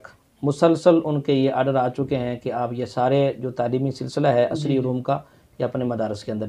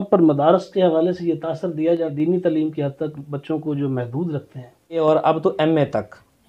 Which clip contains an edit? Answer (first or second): second